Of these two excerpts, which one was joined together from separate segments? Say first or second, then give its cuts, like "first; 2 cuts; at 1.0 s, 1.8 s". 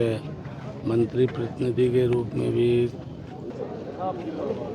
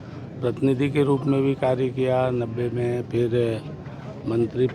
first; 1 cut; at 3.5 s